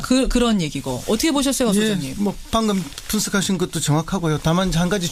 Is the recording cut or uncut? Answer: uncut